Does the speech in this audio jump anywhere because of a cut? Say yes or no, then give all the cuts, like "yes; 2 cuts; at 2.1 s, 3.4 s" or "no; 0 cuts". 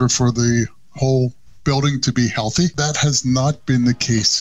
yes; 1 cut; at 2.8 s